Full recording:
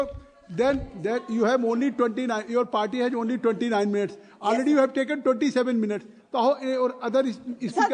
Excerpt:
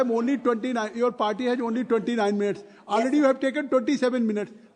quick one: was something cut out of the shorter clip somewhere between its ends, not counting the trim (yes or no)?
no